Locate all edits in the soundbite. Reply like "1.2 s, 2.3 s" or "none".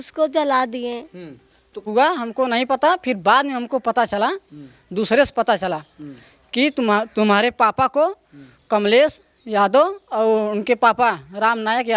1.8 s